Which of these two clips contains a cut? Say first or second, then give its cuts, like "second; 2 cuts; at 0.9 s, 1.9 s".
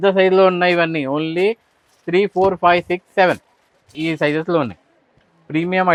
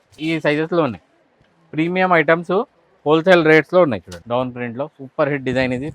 second; 1 cut; at 4.2 s